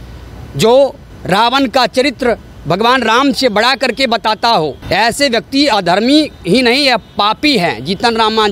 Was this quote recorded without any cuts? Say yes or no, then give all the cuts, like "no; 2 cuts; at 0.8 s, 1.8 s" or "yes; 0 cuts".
no; 2 cuts; at 1.1 s, 4.8 s